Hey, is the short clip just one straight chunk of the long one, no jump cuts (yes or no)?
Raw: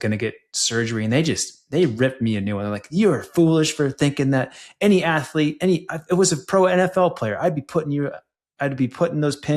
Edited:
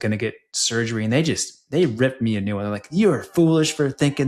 yes